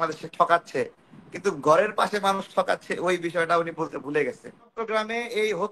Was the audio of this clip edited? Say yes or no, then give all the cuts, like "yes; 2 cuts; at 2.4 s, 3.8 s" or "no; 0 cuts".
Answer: yes; 1 cut; at 4.7 s